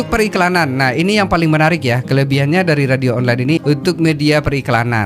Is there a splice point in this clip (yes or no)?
yes